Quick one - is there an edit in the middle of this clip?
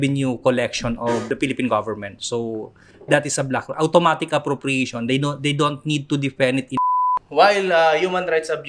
yes; 2 cuts; at 1.3 s, 6.8 s

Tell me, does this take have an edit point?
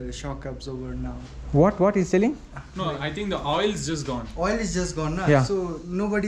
no; 0 cuts

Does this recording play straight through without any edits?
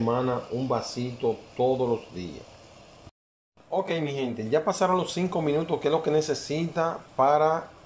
yes; 0 cuts

